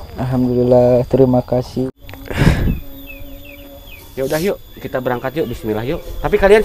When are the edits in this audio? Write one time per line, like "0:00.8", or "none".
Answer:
0:01.8

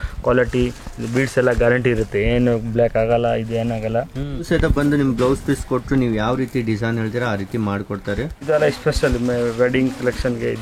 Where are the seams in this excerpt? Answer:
0:04.5
0:08.5

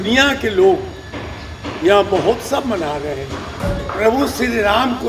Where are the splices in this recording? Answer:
0:03.5

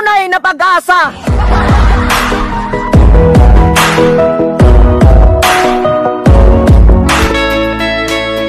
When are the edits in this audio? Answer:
0:01.2
0:06.7

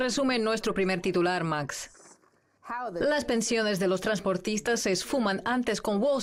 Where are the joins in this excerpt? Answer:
none

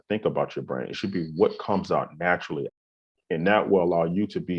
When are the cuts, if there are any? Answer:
0:02.7

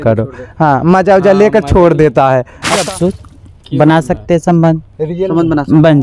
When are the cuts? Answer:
0:02.9

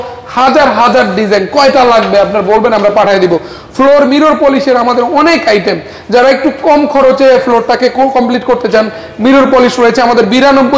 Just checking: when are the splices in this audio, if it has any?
none

